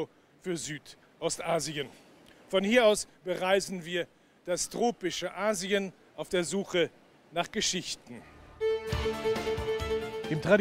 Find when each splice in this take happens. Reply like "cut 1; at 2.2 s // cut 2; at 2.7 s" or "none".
none